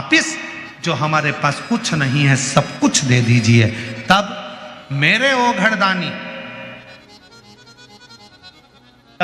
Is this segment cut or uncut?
uncut